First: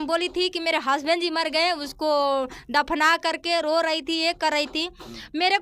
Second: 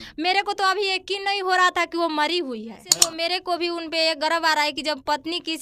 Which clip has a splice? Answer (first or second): second